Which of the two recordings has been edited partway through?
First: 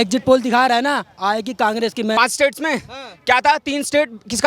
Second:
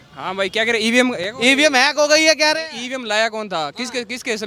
first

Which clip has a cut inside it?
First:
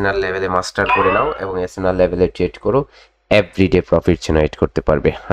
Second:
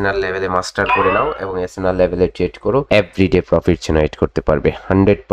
second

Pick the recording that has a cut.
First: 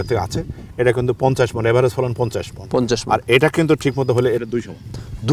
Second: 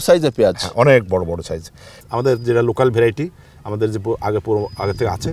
second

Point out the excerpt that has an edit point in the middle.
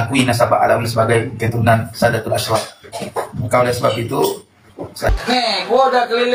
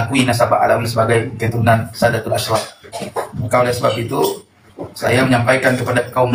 first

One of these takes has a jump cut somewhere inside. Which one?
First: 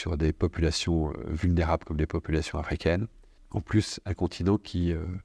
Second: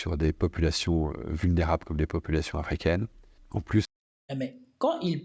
first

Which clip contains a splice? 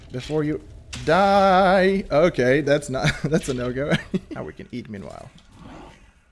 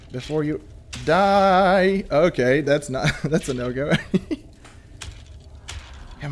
first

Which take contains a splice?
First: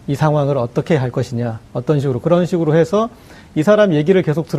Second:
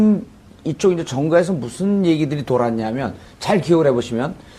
first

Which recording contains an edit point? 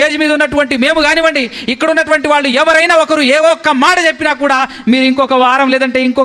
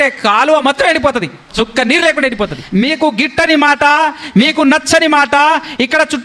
second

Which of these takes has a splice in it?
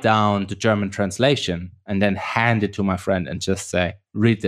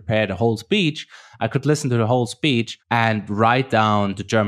second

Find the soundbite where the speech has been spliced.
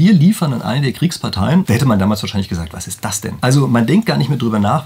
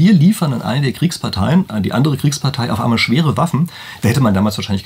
first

